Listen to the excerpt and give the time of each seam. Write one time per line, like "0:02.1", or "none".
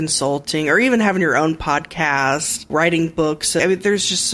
0:02.7
0:03.6

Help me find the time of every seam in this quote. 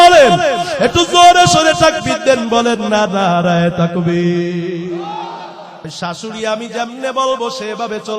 0:05.8

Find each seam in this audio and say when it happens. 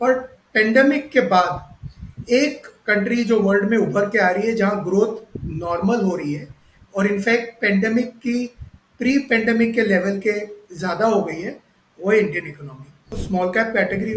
0:13.2

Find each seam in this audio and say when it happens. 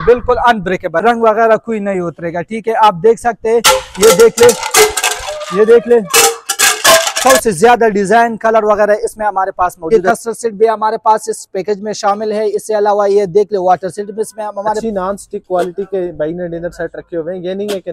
0:01.0
0:07.2
0:09.9
0:14.8

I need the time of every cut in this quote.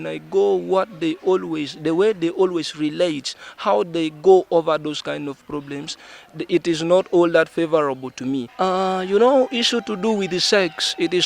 0:08.5

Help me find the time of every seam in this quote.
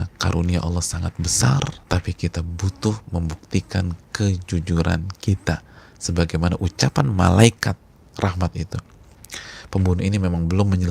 0:01.8

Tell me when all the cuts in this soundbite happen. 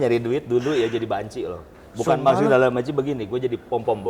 none

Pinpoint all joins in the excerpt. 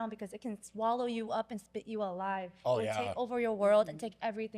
none

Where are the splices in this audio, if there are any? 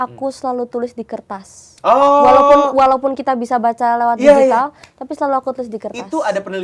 none

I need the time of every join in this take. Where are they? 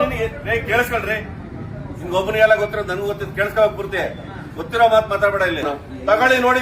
0:05.7

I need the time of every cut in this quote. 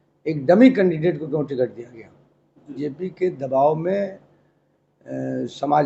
0:02.8

